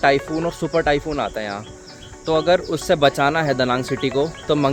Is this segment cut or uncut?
uncut